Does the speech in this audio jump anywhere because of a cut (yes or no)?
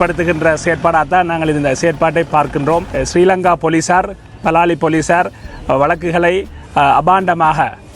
yes